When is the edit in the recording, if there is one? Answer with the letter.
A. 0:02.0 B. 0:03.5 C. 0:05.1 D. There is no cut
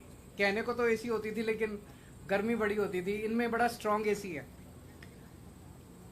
C